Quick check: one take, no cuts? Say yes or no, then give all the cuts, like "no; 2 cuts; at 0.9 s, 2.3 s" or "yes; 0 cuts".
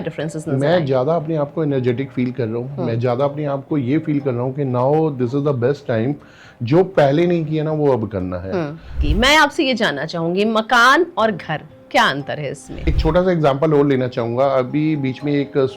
no; 2 cuts; at 9.0 s, 12.8 s